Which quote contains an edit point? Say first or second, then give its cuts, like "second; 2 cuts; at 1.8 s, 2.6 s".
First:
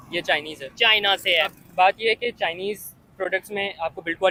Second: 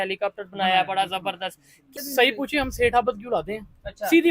second; 1 cut; at 1.9 s